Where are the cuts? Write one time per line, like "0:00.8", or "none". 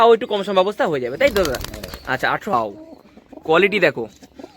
0:02.5